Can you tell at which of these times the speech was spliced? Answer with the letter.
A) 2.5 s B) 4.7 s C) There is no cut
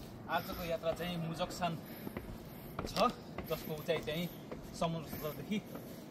C